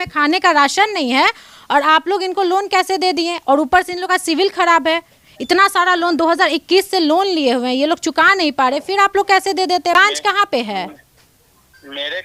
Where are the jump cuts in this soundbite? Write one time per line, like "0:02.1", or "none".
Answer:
none